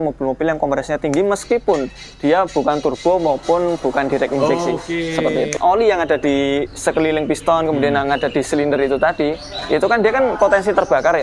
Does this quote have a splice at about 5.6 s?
yes; 1 cut; at 5.6 s

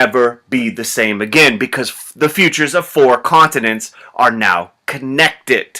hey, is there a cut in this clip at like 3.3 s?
no; 1 cut; at 1.7 s

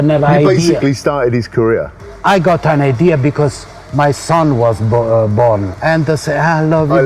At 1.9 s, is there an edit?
yes; 2 cuts; at 1.9 s, 5.7 s

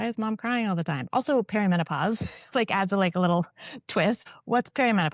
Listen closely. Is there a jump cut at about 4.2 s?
yes; 1 cut; at 4.2 s

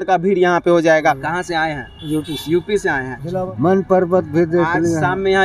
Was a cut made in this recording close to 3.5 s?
yes; 2 cuts; at 1.3 s, 3.5 s

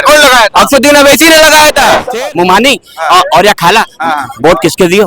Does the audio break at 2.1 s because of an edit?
yes; 1 cut; at 2.1 s

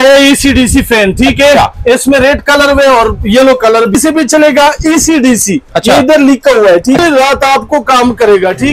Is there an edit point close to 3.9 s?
yes; 2 cuts; at 3.9 s, 7.0 s

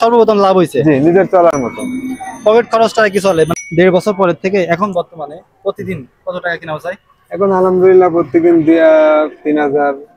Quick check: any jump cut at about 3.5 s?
yes; 1 cut; at 3.5 s

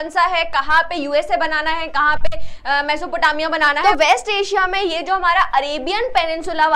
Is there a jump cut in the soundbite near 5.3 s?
no; 1 cut; at 3.8 s

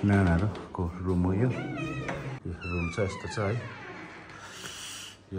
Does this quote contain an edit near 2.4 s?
yes; 1 cut; at 2.4 s

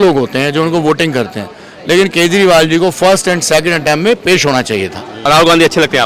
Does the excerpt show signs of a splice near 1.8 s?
no; 1 cut; at 5.1 s

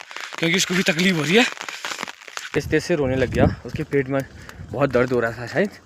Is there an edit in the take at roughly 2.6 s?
yes; 1 cut; at 2.6 s

